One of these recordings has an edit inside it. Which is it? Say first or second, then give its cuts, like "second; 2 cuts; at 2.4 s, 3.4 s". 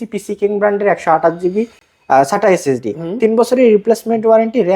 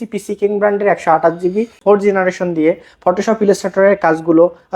second; 1 cut; at 1.8 s